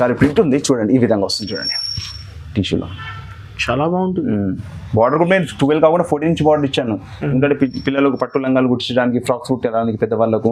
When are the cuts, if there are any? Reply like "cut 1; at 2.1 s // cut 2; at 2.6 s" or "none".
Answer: none